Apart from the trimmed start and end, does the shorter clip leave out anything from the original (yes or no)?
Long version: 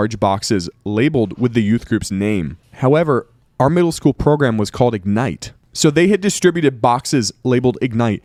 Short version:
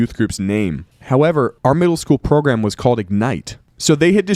yes